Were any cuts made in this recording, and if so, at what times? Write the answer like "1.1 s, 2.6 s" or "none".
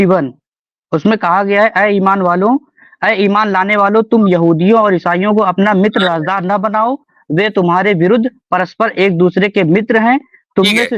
none